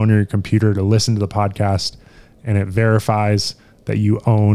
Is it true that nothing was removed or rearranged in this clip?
yes; 0 cuts

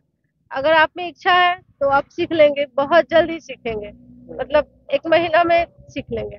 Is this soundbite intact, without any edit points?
yes; 0 cuts

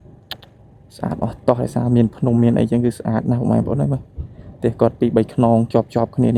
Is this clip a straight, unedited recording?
yes; 0 cuts

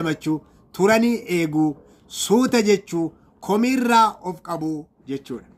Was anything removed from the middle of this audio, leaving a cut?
no; 0 cuts

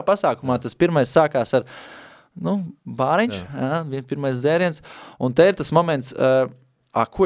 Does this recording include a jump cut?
no; 0 cuts

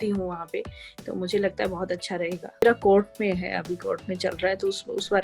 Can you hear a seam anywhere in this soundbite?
yes; 1 cut; at 2.6 s

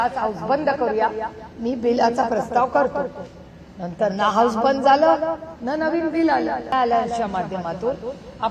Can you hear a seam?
yes; 1 cut; at 6.7 s

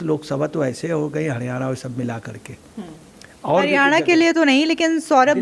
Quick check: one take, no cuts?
yes; 0 cuts

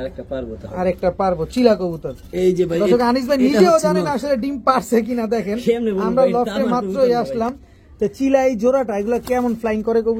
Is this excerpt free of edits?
yes; 0 cuts

